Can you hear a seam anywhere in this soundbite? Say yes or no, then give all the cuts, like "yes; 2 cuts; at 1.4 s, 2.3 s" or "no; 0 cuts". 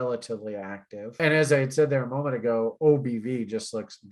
yes; 1 cut; at 1.2 s